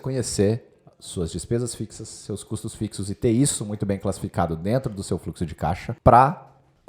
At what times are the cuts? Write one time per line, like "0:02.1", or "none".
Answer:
0:05.9

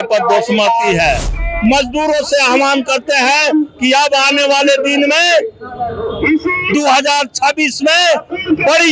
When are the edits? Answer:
0:01.3

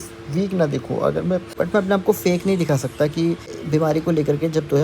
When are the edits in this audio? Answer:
0:01.5
0:03.5

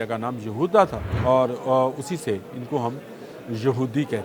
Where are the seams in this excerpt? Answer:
0:01.1

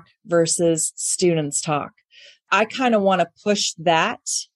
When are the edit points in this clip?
0:02.5

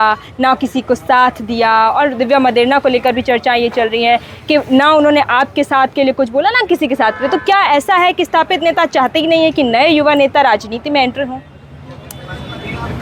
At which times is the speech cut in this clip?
none

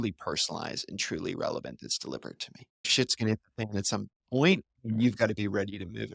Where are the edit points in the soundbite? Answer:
0:02.9

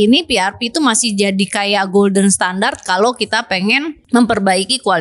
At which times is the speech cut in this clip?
0:04.0

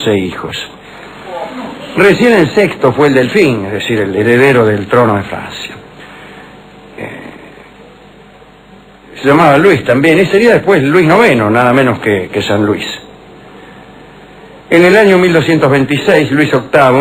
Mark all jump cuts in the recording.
0:11.2

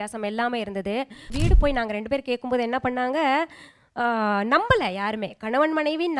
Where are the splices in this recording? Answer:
0:01.3

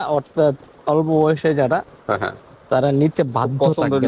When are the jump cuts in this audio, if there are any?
none

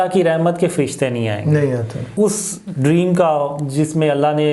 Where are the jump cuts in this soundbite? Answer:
0:02.1

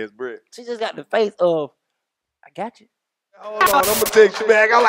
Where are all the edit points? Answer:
0:03.6

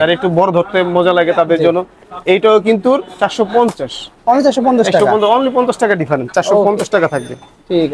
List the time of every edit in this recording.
none

